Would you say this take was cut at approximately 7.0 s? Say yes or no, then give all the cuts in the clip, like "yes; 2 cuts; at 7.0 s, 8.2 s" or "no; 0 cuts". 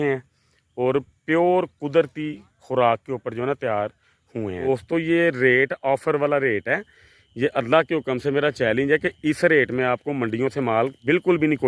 no; 1 cut; at 4.7 s